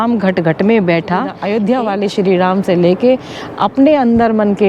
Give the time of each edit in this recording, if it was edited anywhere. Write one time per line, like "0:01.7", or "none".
0:01.4